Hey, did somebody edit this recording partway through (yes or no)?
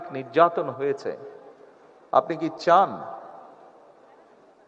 no